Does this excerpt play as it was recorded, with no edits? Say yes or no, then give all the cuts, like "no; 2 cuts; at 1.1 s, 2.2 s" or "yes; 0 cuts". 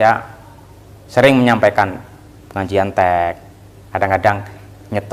yes; 0 cuts